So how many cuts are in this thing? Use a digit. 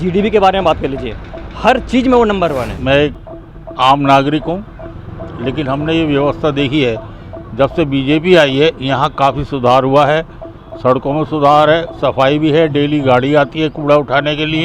1